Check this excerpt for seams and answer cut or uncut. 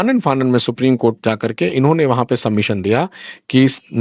uncut